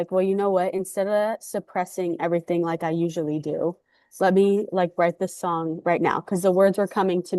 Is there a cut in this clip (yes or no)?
no